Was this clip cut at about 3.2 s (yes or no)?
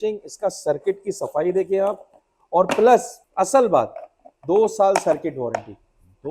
yes